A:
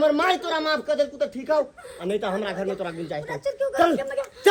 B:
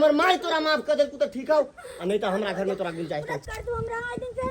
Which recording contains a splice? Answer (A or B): B